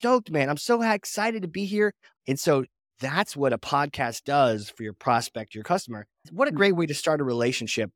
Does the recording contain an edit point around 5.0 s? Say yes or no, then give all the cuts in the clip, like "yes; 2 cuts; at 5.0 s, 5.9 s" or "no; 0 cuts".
no; 2 cuts; at 2.1 s, 6.2 s